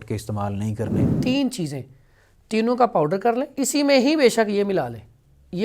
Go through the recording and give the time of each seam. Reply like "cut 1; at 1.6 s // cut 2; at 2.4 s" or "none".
cut 1; at 1.1 s // cut 2; at 3.5 s